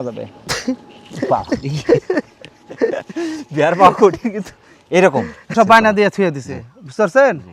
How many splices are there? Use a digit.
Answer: 1